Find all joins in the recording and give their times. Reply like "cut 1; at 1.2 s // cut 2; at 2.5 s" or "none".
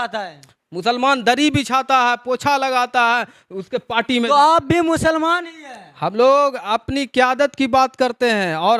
none